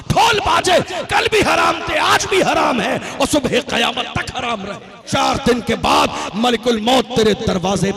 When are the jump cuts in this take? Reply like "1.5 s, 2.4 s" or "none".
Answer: 5.0 s